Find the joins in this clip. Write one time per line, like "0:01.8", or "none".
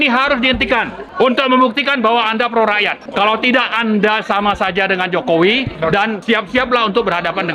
0:01.0
0:03.0
0:06.2